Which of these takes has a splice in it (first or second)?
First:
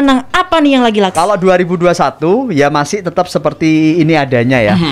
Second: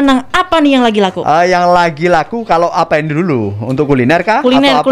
first